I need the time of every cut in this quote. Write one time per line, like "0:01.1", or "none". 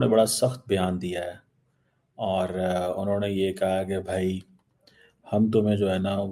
none